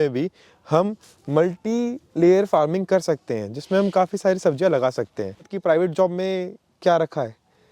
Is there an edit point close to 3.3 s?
no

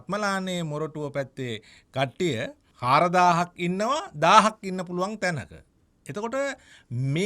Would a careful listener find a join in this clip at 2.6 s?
yes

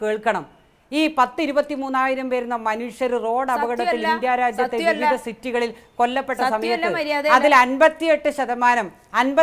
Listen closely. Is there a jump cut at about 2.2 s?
no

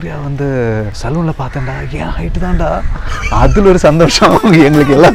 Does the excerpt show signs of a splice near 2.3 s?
no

